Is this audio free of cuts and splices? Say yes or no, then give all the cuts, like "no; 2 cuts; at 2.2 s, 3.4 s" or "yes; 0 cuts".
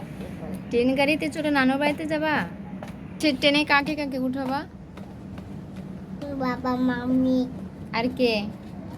no; 1 cut; at 3.2 s